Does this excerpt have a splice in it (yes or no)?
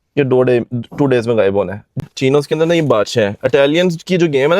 yes